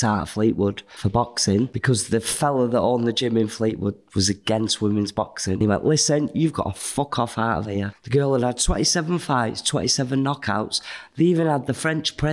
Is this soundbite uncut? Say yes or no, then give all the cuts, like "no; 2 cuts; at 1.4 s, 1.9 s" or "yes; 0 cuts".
no; 4 cuts; at 0.9 s, 1.8 s, 5.6 s, 7.9 s